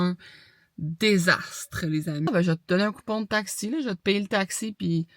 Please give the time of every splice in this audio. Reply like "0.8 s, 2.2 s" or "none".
2.3 s